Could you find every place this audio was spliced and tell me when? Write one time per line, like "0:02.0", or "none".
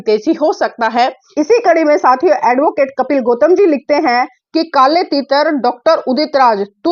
0:01.3

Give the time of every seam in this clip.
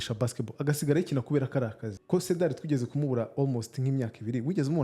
0:01.9

